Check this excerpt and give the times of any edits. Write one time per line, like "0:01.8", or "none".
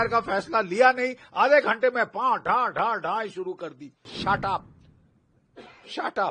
0:04.1